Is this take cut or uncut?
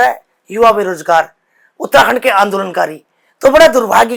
uncut